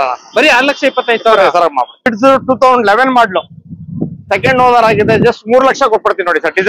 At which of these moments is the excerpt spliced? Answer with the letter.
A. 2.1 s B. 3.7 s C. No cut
A